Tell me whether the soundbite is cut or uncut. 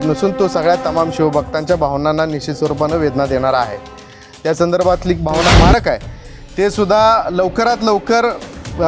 cut